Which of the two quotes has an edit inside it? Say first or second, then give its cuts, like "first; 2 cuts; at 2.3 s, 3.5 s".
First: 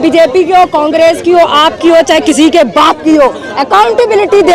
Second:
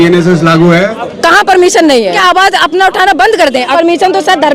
second; 3 cuts; at 1.0 s, 2.2 s, 3.7 s